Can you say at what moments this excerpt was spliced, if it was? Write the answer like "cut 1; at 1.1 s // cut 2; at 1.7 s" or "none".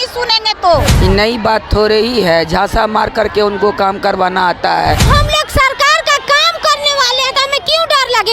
cut 1; at 0.9 s // cut 2; at 5.0 s